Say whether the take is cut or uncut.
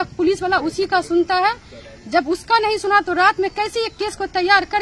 uncut